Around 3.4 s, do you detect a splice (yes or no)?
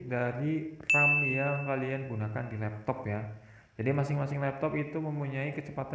no